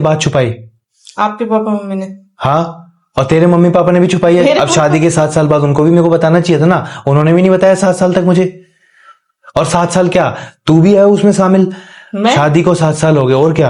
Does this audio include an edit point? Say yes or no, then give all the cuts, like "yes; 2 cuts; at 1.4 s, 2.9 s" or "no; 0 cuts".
no; 0 cuts